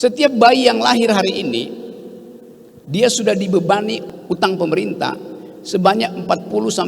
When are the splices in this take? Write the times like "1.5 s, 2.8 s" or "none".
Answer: 4.0 s